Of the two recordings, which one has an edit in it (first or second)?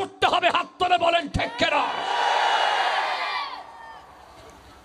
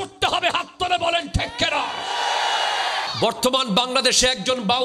second